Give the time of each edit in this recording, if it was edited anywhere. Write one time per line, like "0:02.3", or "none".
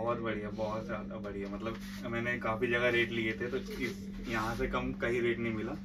none